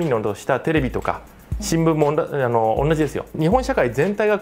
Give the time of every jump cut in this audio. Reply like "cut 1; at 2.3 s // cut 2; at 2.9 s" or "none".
cut 1; at 3.3 s